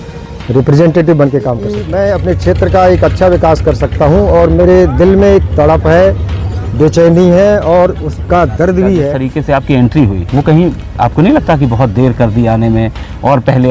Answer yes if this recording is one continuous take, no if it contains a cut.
no